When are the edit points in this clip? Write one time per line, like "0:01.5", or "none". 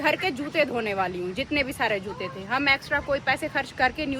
none